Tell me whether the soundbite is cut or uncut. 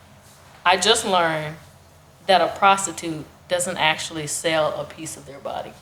uncut